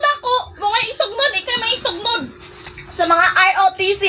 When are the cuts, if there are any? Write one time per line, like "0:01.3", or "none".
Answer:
0:02.4